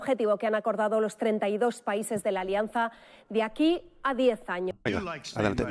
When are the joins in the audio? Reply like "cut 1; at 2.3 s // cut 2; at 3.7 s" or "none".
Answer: cut 1; at 4.7 s